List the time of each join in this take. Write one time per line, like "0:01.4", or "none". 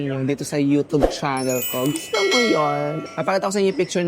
0:03.0